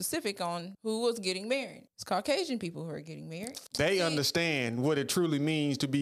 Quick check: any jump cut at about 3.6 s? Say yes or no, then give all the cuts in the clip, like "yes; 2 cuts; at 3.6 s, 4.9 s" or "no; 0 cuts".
yes; 1 cut; at 3.6 s